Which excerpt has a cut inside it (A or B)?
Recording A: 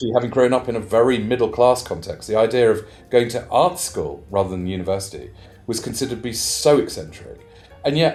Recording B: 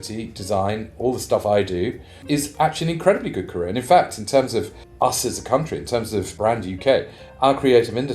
B